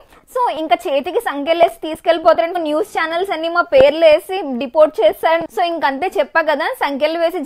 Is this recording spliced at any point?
yes; 2 cuts; at 2.6 s, 5.4 s

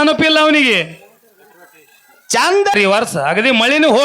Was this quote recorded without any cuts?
no; 1 cut; at 2.7 s

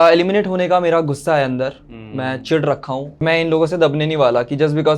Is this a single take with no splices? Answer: no; 1 cut; at 3.2 s

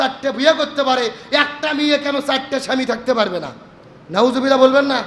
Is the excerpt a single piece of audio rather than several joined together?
yes; 0 cuts

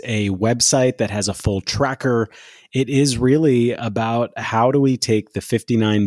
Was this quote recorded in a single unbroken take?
yes; 0 cuts

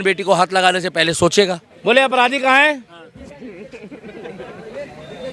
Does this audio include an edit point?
yes; 1 cut; at 1.7 s

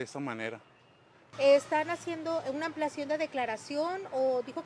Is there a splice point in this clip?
yes; 1 cut; at 1.2 s

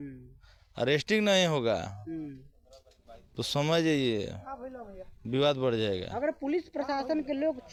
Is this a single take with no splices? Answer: yes; 0 cuts

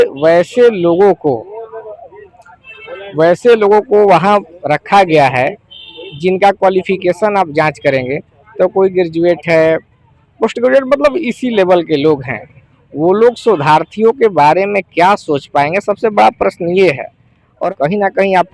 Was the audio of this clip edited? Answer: yes; 1 cut; at 17.6 s

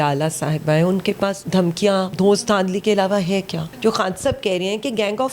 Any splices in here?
yes; 2 cuts; at 1.6 s, 3.6 s

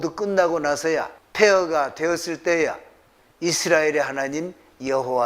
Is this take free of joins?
no; 1 cut; at 1.2 s

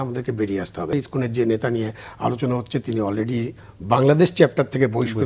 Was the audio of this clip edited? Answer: yes; 1 cut; at 0.9 s

